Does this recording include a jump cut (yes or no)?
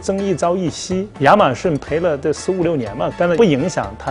yes